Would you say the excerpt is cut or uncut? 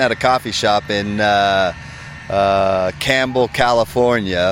uncut